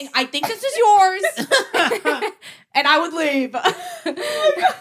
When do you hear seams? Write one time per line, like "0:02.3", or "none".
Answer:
none